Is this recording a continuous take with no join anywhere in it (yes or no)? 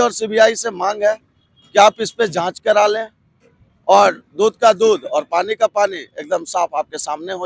yes